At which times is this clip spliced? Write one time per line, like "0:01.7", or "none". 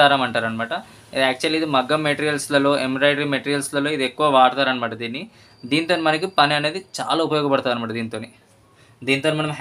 none